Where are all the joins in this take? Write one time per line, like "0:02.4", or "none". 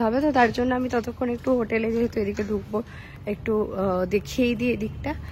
none